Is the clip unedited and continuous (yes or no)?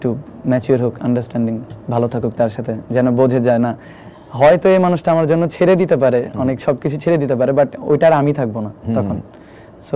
yes